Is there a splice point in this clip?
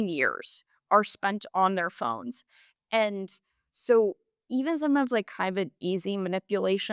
no; 0 cuts

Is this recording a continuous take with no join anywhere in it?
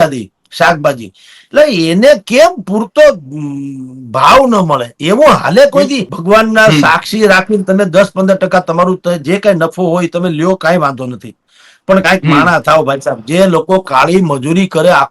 no; 1 cut; at 6.1 s

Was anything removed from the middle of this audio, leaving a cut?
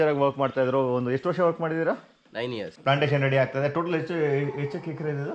yes; 1 cut; at 2.7 s

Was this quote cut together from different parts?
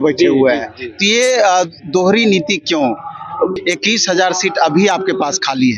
yes; 1 cut; at 3.6 s

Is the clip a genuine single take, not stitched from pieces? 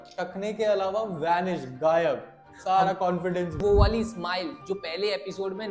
no; 1 cut; at 3.6 s

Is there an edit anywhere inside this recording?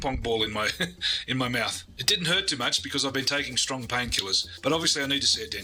no; 0 cuts

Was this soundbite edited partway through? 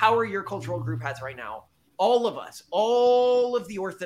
no; 0 cuts

